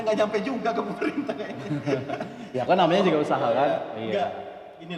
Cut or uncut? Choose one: uncut